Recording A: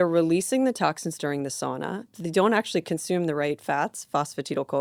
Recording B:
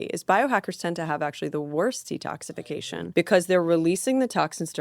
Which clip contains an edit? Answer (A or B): B